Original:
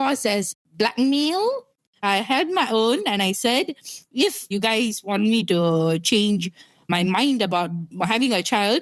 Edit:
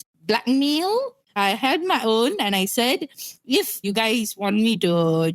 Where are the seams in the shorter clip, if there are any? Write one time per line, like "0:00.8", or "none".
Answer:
0:01.2